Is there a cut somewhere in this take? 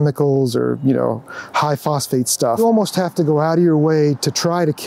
yes; 1 cut; at 2.6 s

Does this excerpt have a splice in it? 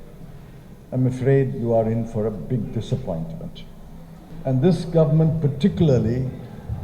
yes; 1 cut; at 4.3 s

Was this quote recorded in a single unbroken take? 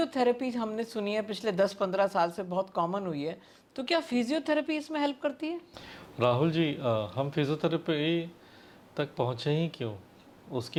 yes; 0 cuts

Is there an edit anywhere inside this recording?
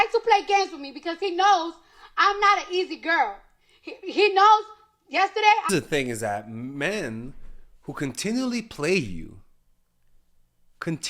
yes; 1 cut; at 5.7 s

